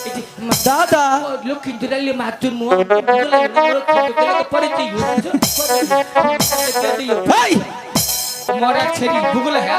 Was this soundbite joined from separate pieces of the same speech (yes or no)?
yes